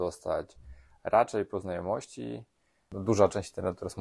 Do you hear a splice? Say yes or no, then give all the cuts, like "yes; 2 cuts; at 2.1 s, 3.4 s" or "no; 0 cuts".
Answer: yes; 1 cut; at 2.8 s